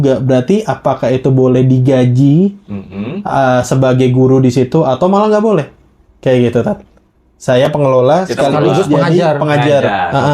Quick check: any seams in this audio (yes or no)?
no